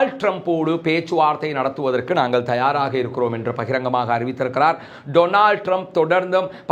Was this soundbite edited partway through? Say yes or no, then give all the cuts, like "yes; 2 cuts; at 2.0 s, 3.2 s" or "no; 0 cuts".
no; 0 cuts